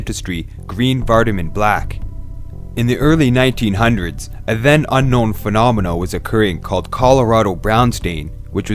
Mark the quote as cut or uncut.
cut